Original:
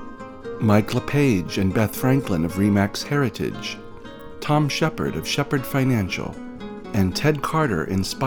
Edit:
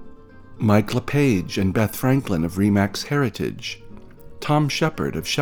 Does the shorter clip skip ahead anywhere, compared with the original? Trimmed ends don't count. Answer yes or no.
no